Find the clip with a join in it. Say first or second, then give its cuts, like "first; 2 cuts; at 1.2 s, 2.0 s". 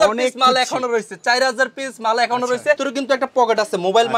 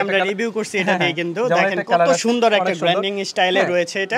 first; 1 cut; at 2.8 s